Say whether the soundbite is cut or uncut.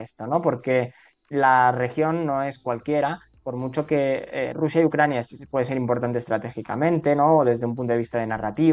uncut